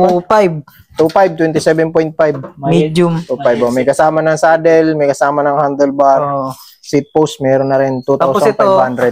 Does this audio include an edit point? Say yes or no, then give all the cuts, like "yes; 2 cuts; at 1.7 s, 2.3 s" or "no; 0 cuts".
no; 0 cuts